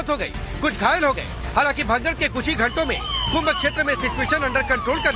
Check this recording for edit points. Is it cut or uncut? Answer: cut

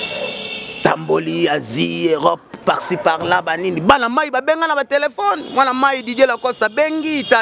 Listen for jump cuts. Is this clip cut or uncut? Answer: uncut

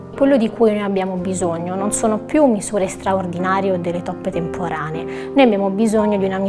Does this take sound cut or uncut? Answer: uncut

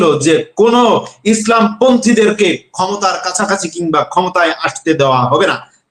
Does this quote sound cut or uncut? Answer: uncut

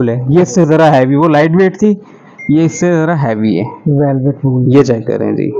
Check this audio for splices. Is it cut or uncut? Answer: uncut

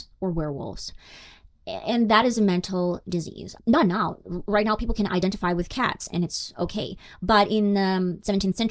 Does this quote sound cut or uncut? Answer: uncut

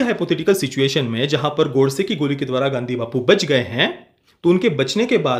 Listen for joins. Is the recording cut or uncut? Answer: uncut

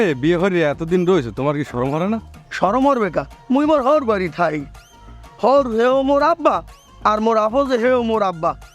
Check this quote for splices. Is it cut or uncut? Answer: uncut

